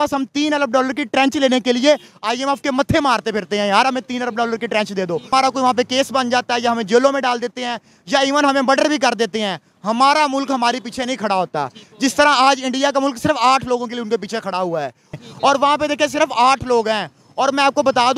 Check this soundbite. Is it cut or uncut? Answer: cut